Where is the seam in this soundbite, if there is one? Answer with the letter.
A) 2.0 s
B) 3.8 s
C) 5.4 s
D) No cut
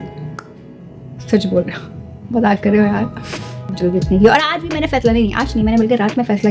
B